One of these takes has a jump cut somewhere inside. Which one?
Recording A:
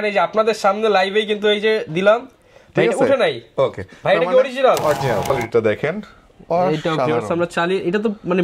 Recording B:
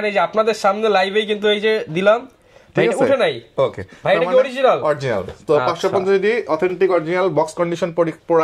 A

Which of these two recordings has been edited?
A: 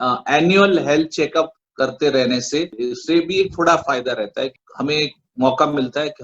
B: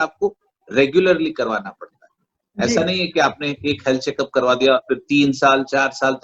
A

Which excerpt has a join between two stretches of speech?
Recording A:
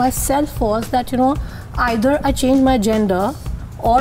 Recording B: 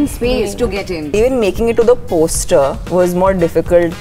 B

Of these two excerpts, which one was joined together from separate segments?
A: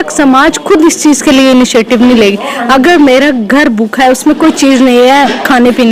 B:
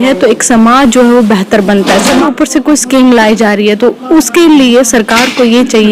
B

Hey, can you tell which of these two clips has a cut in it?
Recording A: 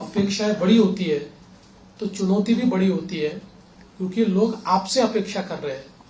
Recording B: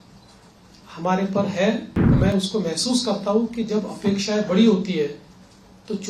B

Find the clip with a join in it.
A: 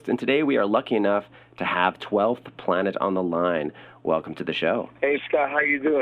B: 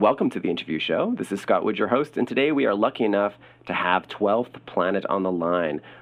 A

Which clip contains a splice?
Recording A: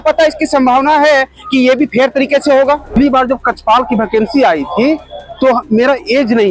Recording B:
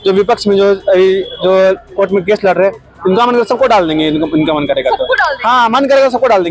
A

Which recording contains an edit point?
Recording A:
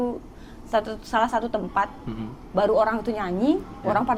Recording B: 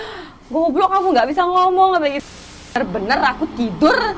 B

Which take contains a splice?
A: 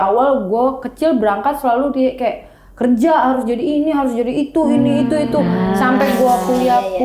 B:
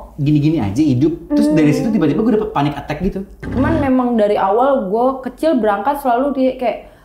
B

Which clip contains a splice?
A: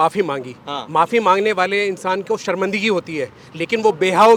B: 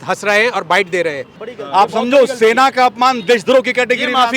B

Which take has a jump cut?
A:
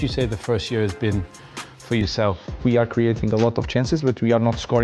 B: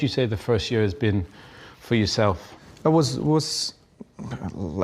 A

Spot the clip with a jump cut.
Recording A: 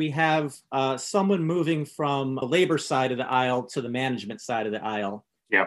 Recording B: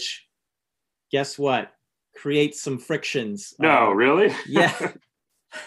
A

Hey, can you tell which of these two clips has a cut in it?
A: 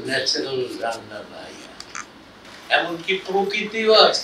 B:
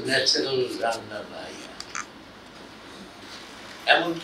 A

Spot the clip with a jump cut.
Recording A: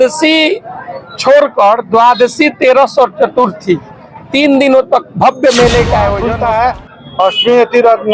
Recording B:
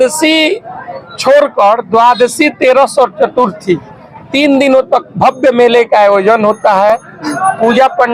A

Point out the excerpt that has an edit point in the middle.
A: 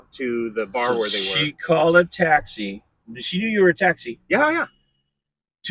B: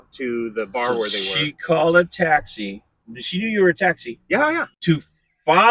B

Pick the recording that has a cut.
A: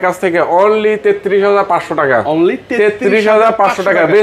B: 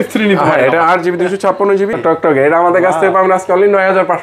B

